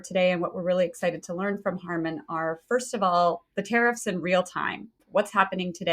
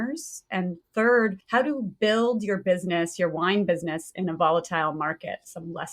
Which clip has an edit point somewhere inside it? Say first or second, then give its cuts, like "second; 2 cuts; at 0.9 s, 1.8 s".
first; 1 cut; at 5.0 s